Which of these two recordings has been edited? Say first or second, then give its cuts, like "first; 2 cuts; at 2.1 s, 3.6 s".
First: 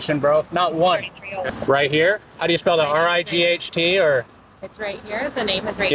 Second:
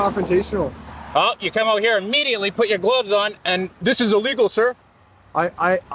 first; 1 cut; at 1.4 s